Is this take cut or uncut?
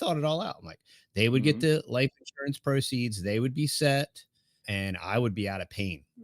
cut